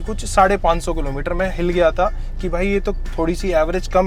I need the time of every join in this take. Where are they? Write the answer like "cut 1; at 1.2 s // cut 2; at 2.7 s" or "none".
none